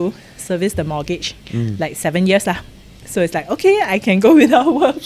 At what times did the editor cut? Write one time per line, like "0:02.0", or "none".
none